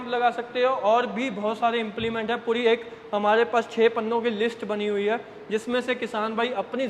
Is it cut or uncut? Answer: uncut